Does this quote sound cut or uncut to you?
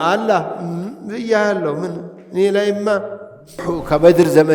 cut